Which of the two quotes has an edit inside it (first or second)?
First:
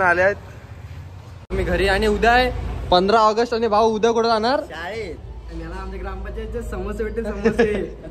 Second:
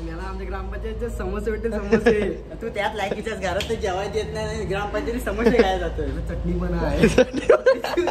first